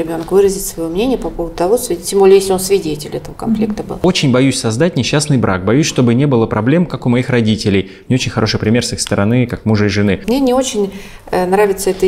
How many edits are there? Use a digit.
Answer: 2